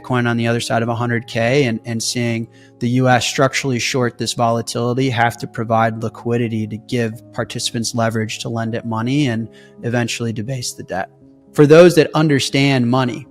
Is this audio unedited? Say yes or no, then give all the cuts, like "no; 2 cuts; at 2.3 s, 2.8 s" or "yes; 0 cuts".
no; 1 cut; at 11.3 s